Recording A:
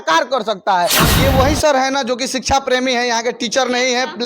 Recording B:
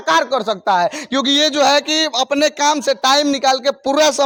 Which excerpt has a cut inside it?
A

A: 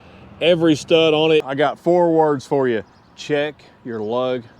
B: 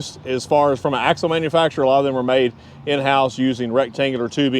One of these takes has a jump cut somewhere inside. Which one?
A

